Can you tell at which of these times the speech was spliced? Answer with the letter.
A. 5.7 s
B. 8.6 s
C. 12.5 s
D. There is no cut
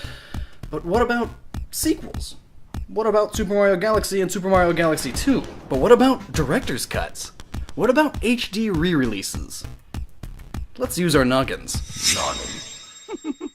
B